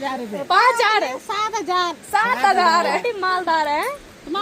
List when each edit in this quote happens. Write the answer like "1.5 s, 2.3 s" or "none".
3.0 s